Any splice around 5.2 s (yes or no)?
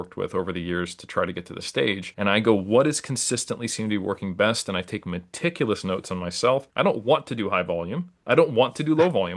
no